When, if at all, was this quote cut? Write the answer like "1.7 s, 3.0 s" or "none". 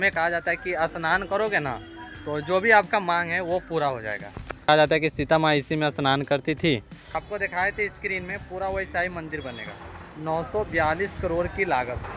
4.6 s, 7.2 s